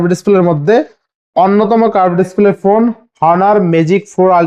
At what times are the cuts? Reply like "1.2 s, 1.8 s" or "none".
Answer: none